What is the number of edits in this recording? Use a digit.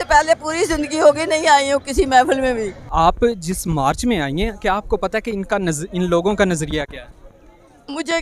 1